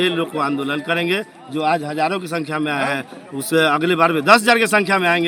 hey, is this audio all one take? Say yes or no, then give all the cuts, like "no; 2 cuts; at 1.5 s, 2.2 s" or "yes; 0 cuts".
yes; 0 cuts